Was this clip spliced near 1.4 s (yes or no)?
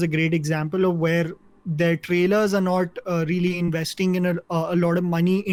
no